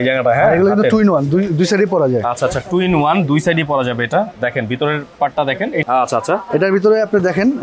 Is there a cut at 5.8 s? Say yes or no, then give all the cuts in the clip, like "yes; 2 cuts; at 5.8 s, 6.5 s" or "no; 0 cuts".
yes; 1 cut; at 5.8 s